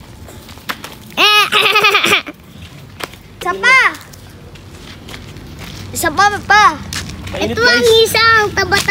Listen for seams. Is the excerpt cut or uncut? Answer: cut